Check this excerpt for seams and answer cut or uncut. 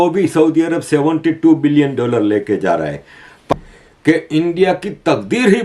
cut